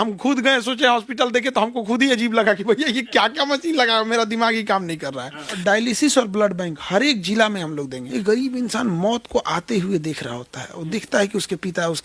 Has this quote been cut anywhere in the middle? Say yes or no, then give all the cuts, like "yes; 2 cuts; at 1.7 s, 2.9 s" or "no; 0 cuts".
yes; 2 cuts; at 5.5 s, 8.0 s